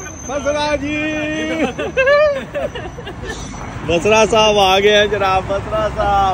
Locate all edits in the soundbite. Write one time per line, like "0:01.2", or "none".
none

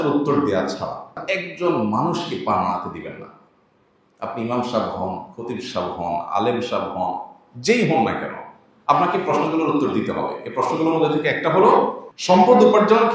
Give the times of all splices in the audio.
0:01.2
0:12.1

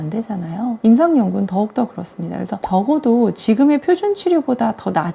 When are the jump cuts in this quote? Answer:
none

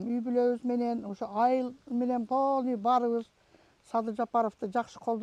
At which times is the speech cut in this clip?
none

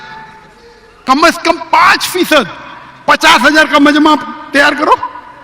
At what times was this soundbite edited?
0:01.0

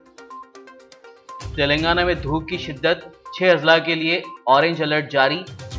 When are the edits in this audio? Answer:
0:01.5

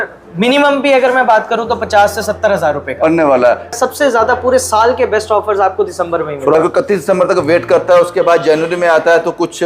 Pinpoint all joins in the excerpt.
0:03.8
0:06.5

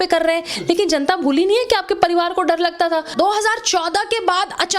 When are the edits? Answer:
0:03.1

